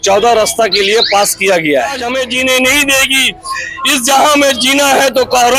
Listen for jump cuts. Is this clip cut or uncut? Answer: cut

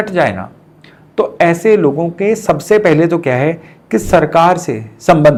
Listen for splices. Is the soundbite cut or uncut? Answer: uncut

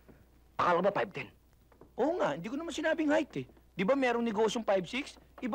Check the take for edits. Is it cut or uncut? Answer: uncut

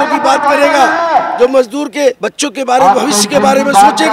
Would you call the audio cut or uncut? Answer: cut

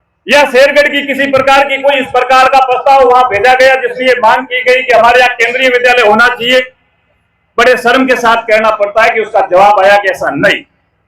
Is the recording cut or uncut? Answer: uncut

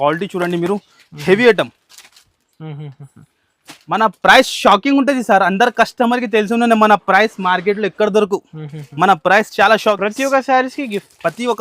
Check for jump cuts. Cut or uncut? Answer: cut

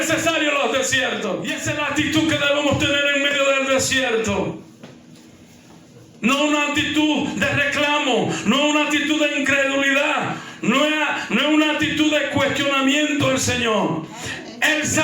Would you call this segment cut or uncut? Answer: cut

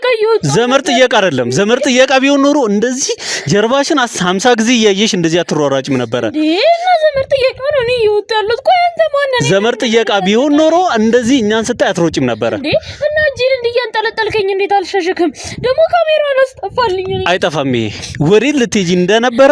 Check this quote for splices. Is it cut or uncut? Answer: uncut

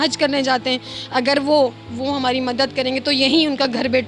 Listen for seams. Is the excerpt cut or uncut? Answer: uncut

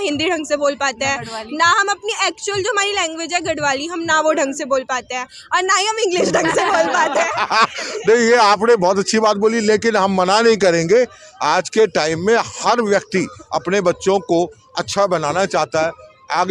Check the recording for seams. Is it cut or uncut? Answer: uncut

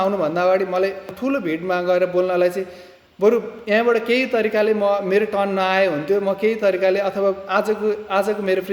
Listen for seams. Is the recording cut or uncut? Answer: cut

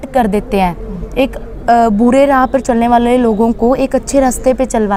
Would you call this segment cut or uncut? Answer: uncut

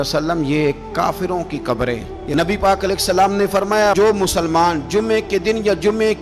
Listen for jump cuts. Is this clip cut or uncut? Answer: cut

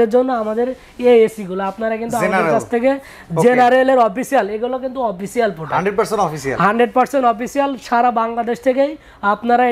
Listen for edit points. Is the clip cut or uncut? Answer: uncut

